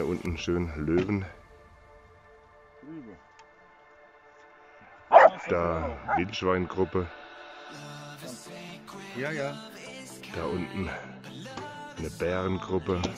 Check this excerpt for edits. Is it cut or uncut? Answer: uncut